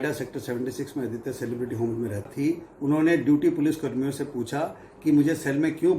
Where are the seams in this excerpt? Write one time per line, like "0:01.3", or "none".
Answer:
0:02.3